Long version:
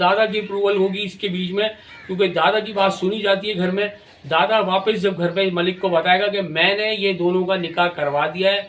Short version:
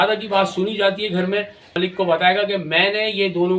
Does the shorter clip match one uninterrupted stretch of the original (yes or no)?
no